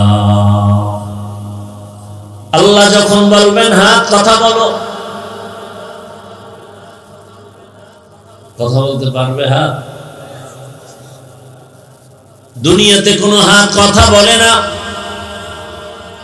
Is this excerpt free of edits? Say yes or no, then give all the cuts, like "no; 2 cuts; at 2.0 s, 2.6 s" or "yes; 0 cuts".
yes; 0 cuts